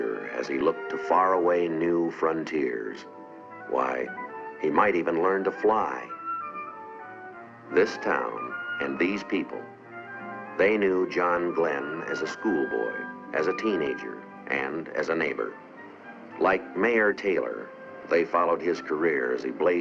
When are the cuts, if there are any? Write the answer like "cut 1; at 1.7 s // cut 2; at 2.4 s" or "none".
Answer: cut 1; at 11.1 s